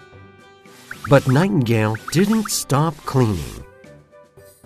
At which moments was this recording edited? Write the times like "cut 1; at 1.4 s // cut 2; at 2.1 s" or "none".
none